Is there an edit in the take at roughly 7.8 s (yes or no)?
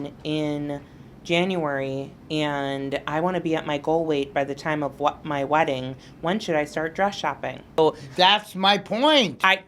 yes